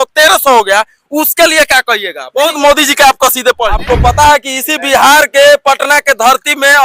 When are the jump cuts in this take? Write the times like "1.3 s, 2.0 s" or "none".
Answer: 3.8 s